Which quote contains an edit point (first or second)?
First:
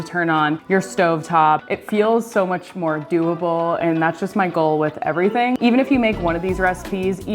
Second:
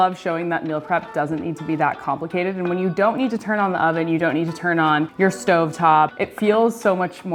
first